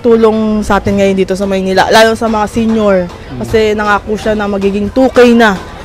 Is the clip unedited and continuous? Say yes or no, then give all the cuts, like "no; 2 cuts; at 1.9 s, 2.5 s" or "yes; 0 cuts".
yes; 0 cuts